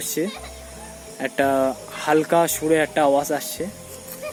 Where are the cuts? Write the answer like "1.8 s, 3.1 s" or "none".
none